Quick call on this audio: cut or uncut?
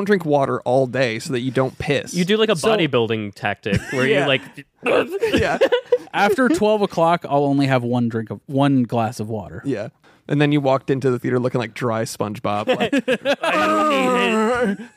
cut